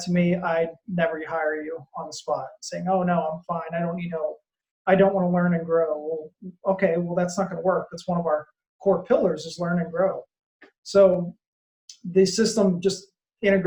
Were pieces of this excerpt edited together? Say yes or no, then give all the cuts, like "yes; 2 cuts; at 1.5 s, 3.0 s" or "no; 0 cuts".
no; 0 cuts